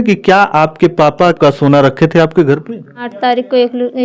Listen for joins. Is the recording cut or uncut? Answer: cut